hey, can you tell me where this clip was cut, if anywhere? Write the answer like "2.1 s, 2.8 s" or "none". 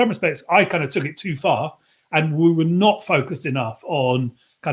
none